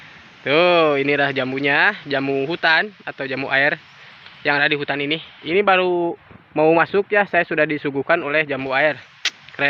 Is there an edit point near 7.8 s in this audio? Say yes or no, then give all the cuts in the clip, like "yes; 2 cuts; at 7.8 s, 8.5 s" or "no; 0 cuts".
no; 0 cuts